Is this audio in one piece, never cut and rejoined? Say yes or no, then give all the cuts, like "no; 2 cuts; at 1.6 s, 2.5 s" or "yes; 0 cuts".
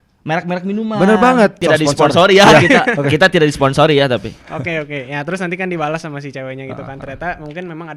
no; 1 cut; at 1.6 s